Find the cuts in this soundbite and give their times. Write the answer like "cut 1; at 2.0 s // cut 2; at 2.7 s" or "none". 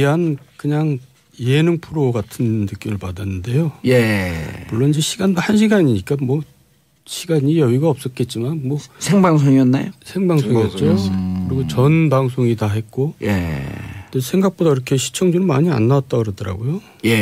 none